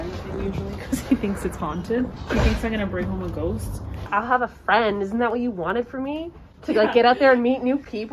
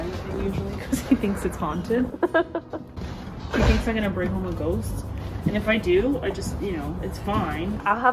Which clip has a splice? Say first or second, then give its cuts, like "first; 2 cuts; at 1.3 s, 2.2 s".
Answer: first; 2 cuts; at 2.1 s, 4.0 s